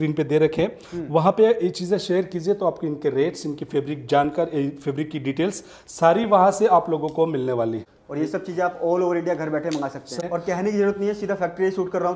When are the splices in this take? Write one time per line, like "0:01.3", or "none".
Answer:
0:07.9
0:10.2